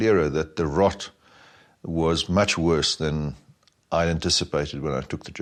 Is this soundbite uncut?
yes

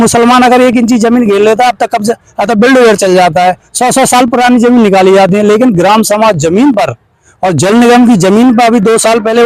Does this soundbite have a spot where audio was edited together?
no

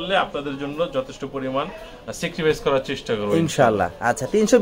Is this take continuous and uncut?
yes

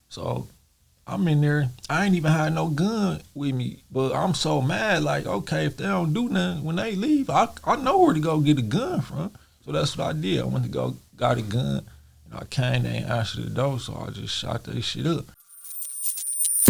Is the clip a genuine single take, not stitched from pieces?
no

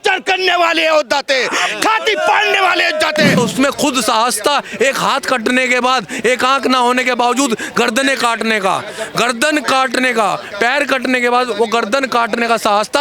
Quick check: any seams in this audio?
yes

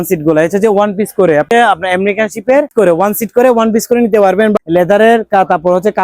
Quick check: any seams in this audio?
yes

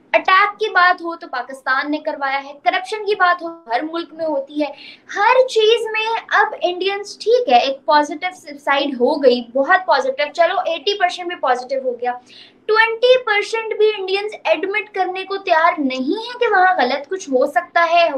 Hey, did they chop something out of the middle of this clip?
no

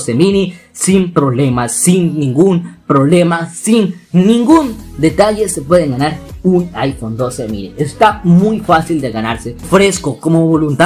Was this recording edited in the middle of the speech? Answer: yes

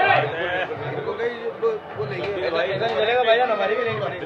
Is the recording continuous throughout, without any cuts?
yes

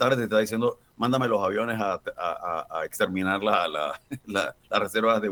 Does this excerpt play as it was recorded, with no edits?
yes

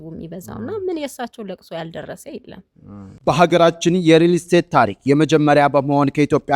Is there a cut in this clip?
yes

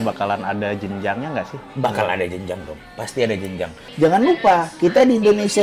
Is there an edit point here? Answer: yes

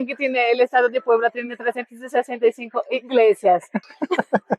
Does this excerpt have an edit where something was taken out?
yes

